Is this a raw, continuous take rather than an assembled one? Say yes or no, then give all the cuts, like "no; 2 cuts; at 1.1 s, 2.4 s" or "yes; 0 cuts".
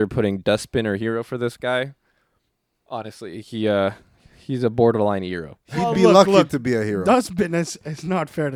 yes; 0 cuts